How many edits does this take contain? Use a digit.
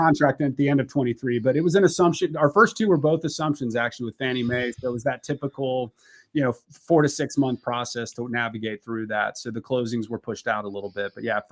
0